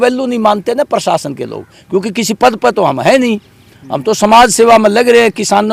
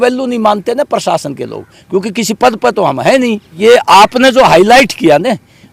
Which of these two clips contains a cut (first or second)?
second